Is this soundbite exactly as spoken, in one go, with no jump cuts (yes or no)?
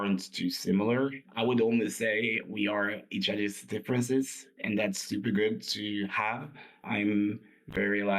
no